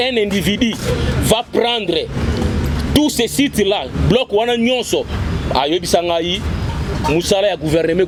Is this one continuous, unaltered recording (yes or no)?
yes